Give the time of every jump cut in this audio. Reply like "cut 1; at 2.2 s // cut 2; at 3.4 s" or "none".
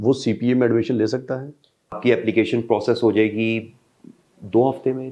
cut 1; at 2.0 s